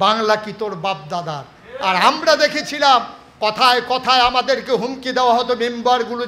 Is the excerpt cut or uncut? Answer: uncut